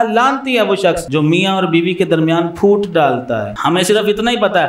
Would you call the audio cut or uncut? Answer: cut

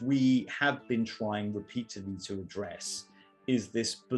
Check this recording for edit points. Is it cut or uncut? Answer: uncut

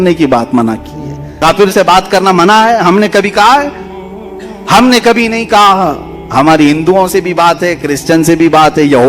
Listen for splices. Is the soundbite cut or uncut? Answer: cut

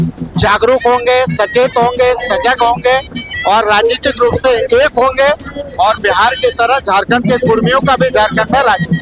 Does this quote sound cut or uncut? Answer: uncut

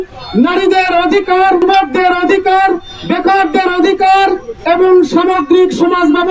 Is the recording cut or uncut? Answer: cut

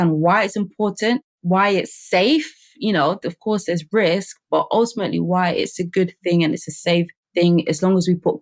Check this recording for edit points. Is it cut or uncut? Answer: uncut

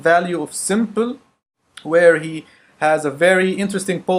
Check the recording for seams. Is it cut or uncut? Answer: uncut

